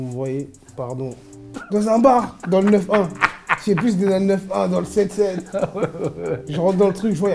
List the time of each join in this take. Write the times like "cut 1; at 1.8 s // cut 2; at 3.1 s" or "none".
cut 1; at 1.5 s